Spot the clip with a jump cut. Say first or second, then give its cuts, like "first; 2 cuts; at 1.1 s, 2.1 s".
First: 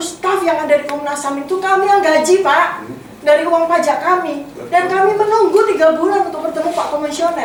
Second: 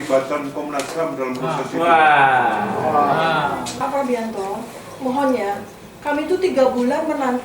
second; 1 cut; at 3.7 s